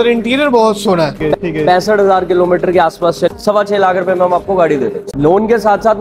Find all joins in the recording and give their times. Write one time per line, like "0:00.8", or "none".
0:01.4
0:03.3
0:05.0